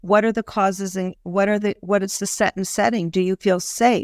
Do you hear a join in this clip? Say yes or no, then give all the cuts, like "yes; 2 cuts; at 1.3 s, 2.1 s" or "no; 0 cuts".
no; 0 cuts